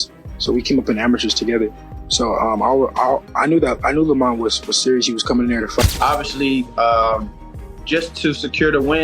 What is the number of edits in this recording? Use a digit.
1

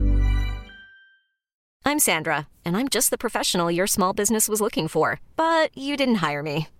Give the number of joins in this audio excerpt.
1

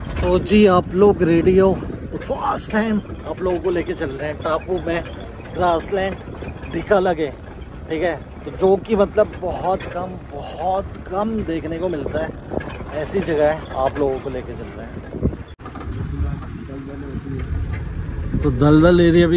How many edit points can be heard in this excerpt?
1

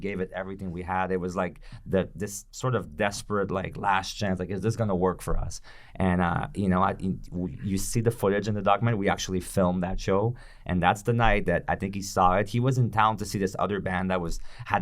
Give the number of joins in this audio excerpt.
0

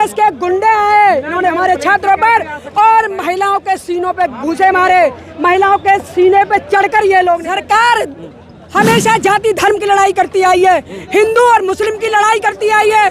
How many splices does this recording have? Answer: 1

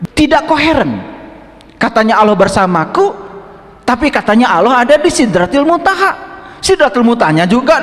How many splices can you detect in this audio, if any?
0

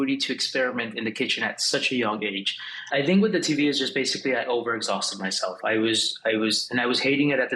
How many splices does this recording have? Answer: 1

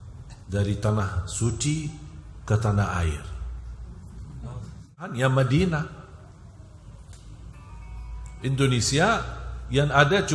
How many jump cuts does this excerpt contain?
1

